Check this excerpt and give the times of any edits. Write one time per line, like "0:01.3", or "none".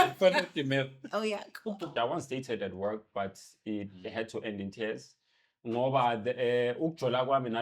0:01.9